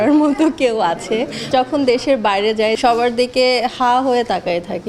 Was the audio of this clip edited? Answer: yes; 2 cuts; at 1.5 s, 2.8 s

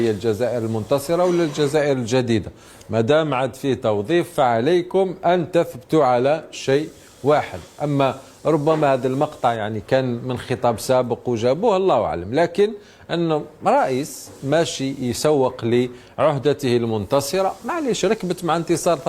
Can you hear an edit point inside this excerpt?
no; 0 cuts

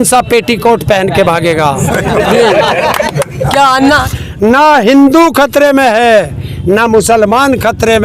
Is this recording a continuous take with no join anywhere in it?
no; 1 cut; at 4.0 s

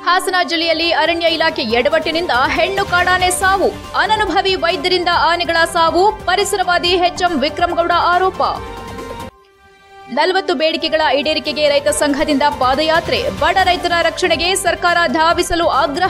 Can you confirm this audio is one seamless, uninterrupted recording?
yes; 0 cuts

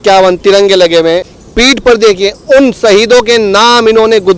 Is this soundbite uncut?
no; 1 cut; at 1.3 s

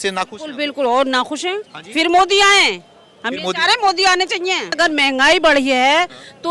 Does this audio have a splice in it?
yes; 2 cuts; at 1.7 s, 4.8 s

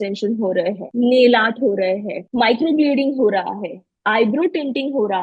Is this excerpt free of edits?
no; 2 cuts; at 0.8 s, 2.2 s

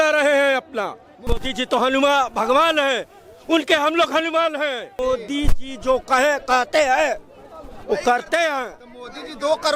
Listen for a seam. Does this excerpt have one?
yes; 2 cuts; at 1.3 s, 5.0 s

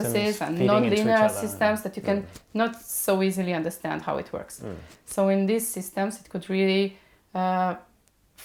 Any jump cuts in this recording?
no; 0 cuts

